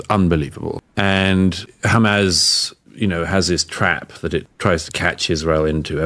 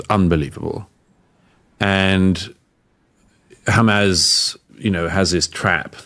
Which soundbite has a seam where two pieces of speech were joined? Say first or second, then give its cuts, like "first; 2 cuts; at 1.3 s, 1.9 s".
first; 3 cuts; at 0.8 s, 1.7 s, 4.5 s